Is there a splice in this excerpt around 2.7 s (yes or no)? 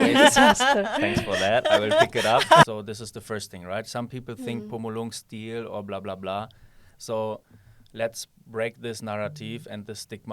yes